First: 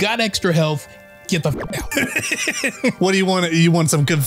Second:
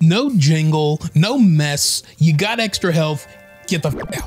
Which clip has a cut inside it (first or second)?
first